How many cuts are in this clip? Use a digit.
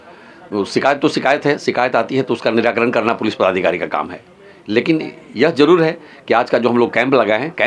0